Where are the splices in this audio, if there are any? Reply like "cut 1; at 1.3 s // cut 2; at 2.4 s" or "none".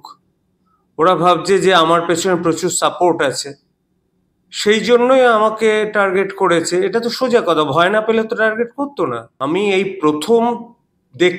cut 1; at 9.3 s